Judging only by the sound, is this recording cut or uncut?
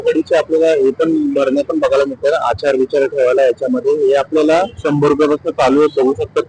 uncut